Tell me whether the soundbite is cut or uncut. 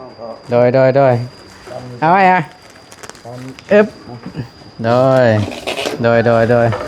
uncut